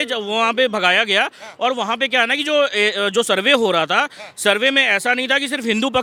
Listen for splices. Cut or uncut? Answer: uncut